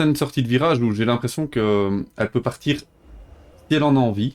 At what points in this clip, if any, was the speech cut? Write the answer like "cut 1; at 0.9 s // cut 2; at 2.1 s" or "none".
none